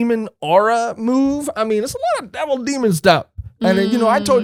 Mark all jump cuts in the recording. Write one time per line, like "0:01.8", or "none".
none